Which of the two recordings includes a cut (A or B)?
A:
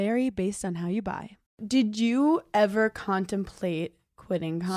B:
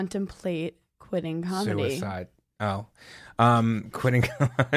A